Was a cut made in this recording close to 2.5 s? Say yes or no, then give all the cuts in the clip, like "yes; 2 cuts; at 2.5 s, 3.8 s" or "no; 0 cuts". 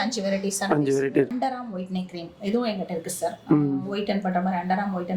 no; 1 cut; at 1.3 s